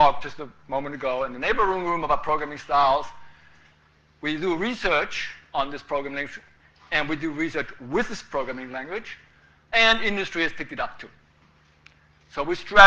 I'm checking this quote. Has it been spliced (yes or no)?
no